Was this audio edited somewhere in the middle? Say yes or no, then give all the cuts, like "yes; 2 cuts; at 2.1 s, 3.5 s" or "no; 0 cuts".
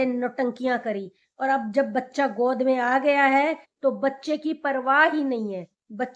no; 0 cuts